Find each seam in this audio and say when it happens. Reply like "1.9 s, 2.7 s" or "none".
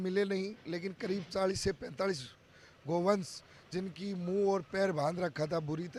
none